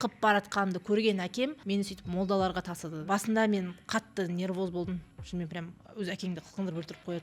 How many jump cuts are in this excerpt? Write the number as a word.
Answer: two